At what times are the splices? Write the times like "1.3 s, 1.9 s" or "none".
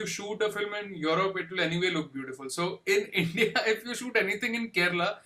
none

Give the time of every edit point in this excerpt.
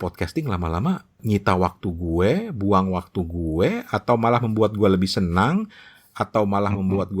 1.2 s

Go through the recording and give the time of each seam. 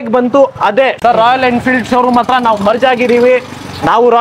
1.0 s

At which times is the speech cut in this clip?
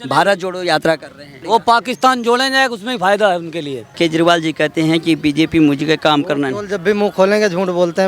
1.4 s, 3.9 s

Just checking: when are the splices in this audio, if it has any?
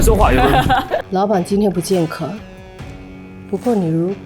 1.1 s

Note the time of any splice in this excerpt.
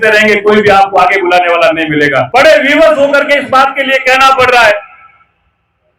2.3 s

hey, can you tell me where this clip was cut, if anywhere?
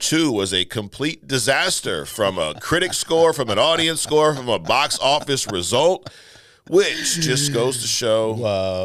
none

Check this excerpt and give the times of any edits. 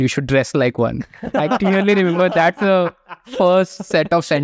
none

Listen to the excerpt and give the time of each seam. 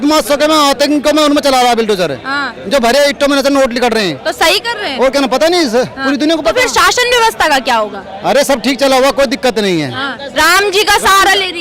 none

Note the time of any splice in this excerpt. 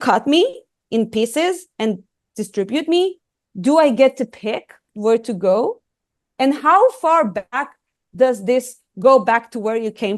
4.8 s

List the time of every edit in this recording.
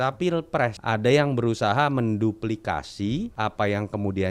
0.8 s, 3.3 s

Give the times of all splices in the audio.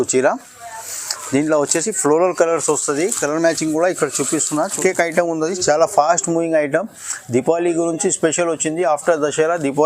4.7 s

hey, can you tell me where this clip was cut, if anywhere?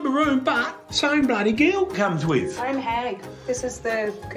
none

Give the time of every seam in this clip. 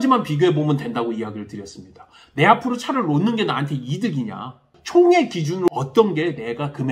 4.7 s, 5.7 s

